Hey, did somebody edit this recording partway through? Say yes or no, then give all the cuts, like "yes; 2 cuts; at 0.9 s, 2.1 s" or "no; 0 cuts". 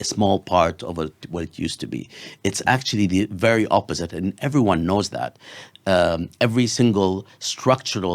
no; 0 cuts